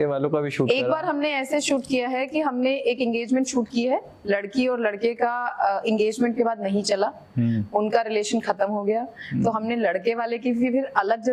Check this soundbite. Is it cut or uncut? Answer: uncut